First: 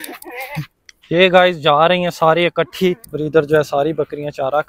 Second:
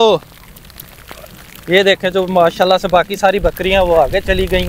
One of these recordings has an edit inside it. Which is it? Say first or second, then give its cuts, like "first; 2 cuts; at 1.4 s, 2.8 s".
first; 1 cut; at 3.0 s